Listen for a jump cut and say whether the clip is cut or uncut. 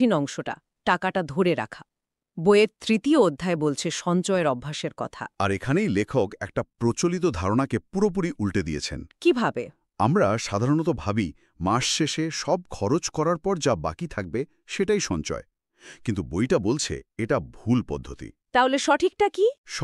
uncut